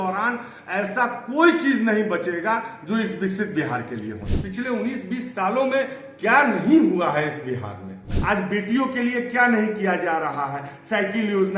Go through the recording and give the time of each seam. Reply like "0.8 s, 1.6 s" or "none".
4.2 s, 8.1 s